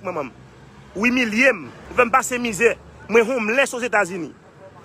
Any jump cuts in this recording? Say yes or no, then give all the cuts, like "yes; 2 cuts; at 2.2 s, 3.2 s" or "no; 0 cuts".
yes; 1 cut; at 1.8 s